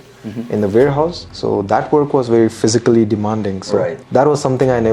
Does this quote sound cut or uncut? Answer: cut